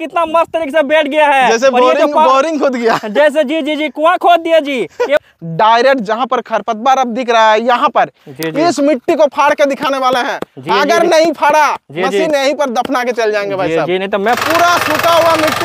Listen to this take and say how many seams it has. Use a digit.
2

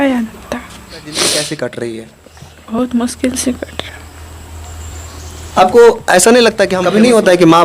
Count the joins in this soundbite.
2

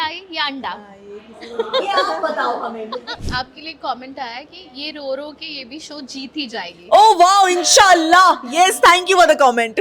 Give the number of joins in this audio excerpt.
1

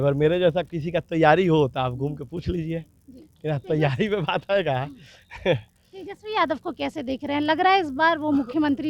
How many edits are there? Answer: 0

